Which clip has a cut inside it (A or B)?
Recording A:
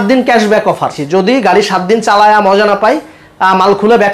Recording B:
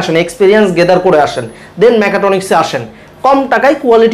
A